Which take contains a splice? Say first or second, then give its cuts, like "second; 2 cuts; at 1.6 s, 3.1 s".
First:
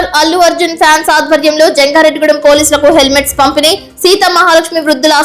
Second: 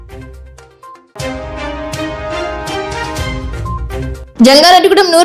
second; 1 cut; at 0.9 s